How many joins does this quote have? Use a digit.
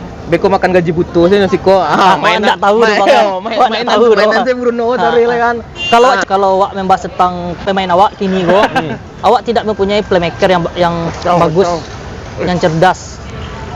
1